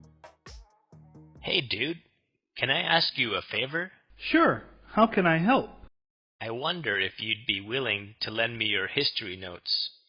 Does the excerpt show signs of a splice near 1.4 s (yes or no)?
yes